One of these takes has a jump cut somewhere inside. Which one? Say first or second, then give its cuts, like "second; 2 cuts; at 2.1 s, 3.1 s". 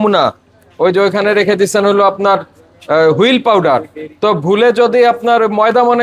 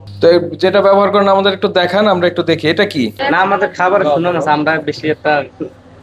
second; 1 cut; at 3.2 s